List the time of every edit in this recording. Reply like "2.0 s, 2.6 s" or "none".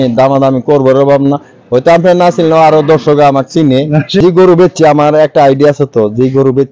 4.2 s